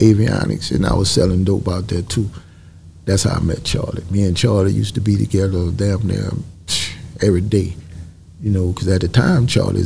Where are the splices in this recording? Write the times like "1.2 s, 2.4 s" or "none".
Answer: none